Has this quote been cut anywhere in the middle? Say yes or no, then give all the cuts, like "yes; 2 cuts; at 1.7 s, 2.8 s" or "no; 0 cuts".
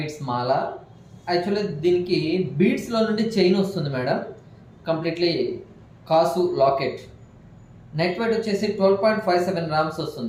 no; 0 cuts